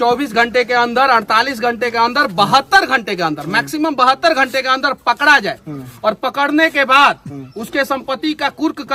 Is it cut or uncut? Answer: uncut